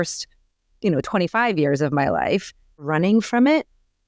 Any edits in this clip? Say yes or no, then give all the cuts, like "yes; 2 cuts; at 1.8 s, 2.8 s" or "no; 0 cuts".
yes; 1 cut; at 2.9 s